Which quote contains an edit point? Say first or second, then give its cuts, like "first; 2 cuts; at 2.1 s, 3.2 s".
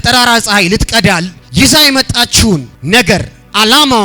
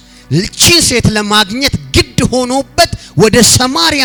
first; 2 cuts; at 1.4 s, 2.7 s